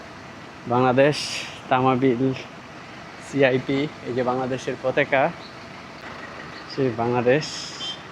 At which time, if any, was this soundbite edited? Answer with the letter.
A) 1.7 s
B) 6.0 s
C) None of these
B